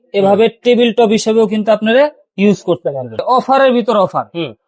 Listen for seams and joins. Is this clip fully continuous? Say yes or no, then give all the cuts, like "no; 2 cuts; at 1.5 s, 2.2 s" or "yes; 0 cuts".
no; 1 cut; at 3.2 s